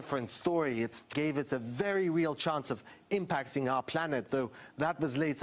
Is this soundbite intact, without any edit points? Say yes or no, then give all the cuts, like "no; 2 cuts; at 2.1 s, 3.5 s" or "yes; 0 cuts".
yes; 0 cuts